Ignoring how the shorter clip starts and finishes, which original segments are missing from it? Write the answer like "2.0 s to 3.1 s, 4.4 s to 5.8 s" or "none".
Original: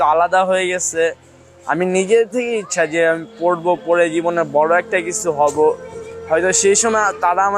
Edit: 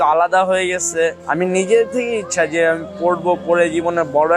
1.2 s to 1.6 s